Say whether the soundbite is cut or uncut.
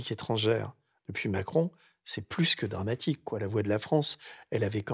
uncut